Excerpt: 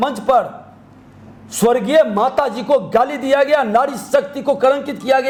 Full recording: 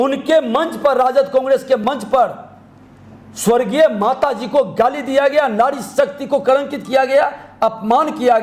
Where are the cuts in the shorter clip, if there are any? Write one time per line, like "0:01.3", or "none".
none

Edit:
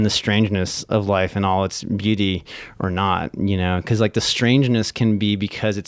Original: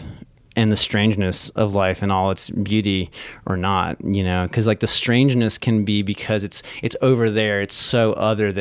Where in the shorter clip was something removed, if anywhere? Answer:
none

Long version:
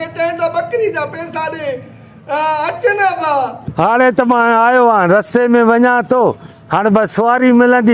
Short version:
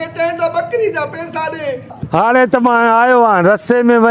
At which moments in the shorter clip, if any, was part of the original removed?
0:02.0

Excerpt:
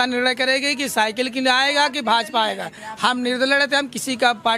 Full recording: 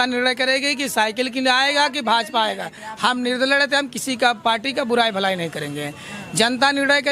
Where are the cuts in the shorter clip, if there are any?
none

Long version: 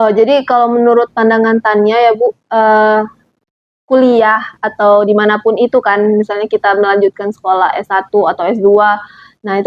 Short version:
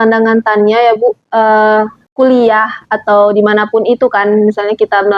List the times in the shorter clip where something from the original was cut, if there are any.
0:02.0

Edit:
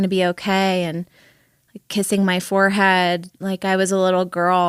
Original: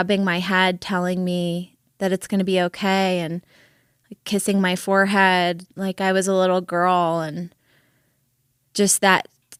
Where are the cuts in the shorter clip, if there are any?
none

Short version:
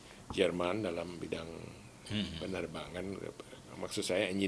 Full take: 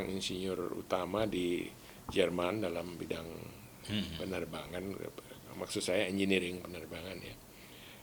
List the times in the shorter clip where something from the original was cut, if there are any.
none

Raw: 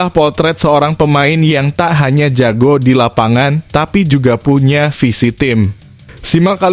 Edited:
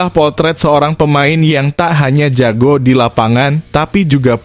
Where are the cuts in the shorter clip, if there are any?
none

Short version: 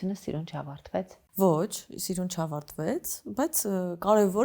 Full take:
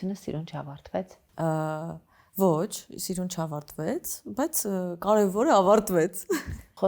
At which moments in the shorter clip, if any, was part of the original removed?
0:01.2

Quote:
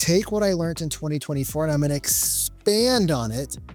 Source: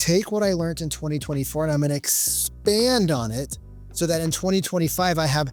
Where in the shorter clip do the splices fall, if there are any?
none

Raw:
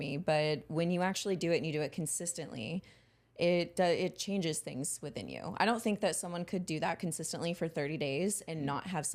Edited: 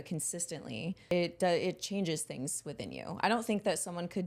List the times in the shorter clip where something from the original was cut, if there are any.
0:01.1

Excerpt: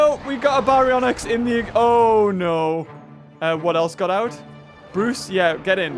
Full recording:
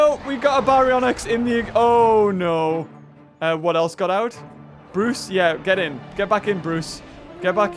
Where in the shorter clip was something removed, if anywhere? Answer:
none

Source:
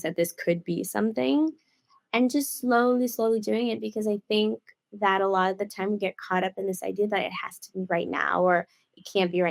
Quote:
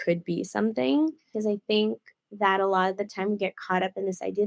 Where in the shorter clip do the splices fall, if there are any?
0:01.3

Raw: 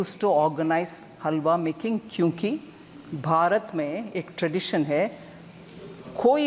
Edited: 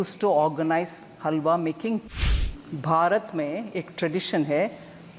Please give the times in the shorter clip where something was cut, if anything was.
0:02.2

